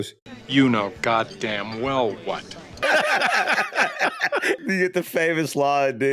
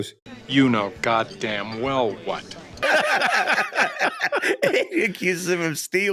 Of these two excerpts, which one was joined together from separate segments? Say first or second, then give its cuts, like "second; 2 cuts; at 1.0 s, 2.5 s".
first; 1 cut; at 4.6 s